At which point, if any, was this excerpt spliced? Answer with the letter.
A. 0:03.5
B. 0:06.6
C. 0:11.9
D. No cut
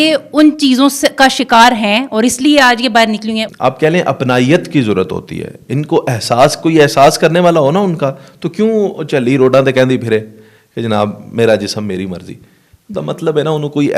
A